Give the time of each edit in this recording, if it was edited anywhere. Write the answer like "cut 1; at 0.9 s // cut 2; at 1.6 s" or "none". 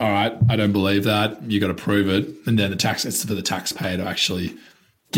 none